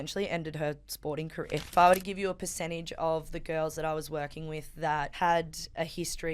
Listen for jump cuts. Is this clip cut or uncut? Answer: cut